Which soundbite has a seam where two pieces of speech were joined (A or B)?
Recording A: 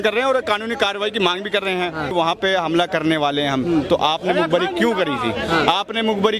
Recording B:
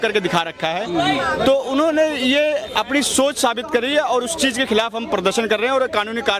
A